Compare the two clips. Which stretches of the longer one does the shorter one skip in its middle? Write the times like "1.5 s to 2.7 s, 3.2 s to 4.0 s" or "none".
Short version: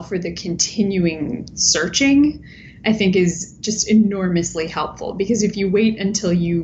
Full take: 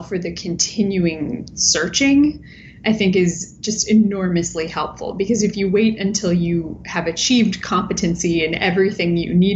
none